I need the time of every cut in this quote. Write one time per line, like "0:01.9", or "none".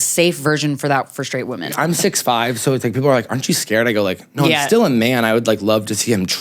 0:01.7